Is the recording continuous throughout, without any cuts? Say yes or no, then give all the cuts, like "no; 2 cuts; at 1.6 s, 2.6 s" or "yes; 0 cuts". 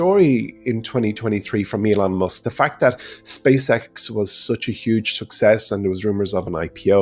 yes; 0 cuts